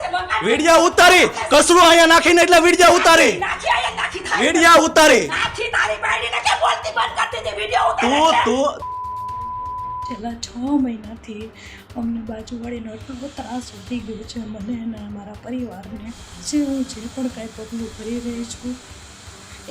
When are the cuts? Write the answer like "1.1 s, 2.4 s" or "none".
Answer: 10.1 s, 16.3 s